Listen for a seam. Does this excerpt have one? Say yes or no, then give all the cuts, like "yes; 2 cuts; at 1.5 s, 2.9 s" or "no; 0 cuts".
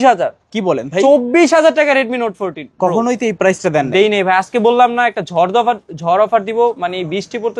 no; 0 cuts